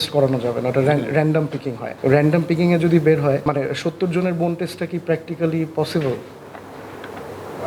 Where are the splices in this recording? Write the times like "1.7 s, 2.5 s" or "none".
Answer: none